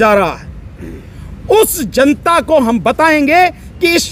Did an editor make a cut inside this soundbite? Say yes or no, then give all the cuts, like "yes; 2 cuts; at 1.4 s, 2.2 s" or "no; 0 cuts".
no; 0 cuts